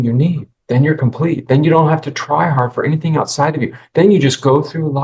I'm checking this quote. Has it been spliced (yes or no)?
no